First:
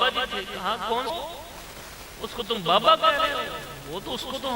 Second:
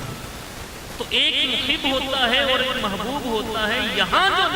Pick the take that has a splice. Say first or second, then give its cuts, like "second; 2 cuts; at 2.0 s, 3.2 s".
first; 1 cut; at 1.1 s